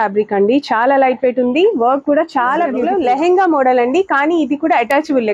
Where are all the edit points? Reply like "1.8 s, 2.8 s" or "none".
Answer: 2.8 s